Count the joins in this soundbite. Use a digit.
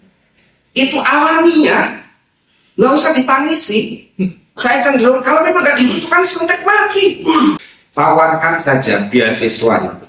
1